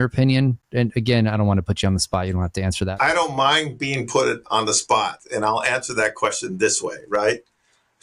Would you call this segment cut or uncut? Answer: cut